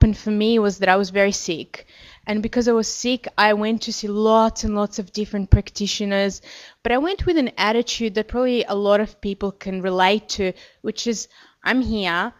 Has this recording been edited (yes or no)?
no